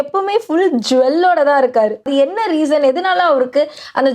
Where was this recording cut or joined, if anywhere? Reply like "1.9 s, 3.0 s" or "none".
2.1 s